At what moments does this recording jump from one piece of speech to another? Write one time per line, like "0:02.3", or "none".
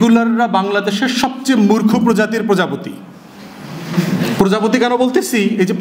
none